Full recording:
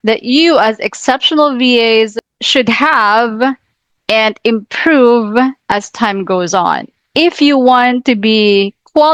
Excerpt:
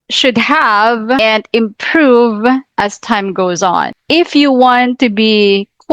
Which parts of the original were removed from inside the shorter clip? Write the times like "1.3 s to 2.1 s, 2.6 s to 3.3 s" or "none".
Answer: 3.5 s to 4.1 s, 6.9 s to 7.0 s